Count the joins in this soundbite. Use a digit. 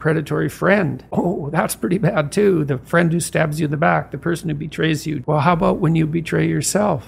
2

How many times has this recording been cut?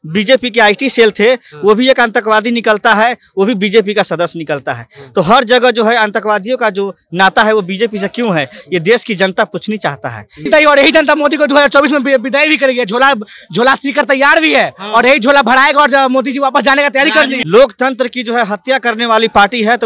2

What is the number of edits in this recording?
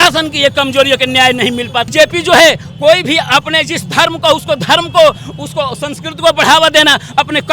1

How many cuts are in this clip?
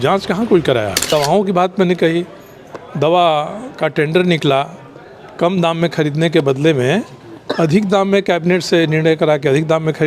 1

